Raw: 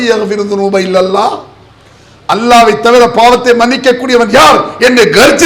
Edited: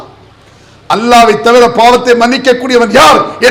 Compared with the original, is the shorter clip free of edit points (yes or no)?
yes